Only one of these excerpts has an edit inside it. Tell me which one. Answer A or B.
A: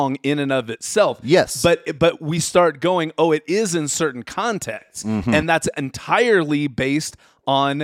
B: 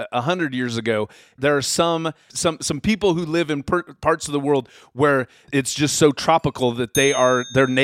B